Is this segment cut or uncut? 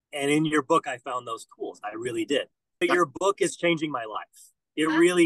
cut